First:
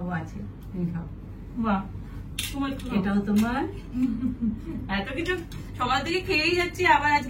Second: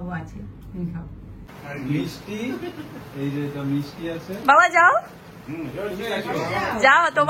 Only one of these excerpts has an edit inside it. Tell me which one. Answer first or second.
second